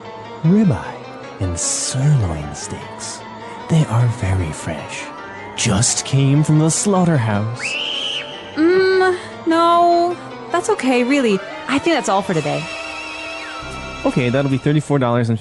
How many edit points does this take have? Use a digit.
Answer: 1